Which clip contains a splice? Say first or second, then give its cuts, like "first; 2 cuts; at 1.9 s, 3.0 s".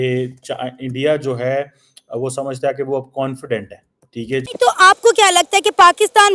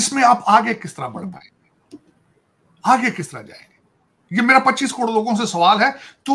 first; 1 cut; at 4.5 s